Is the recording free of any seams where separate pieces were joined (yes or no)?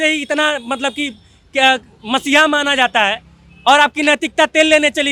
yes